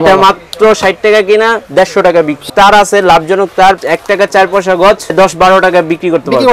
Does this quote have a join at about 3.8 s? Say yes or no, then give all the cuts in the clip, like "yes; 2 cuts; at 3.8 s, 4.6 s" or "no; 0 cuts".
yes; 3 cuts; at 2.4 s, 3.8 s, 5.1 s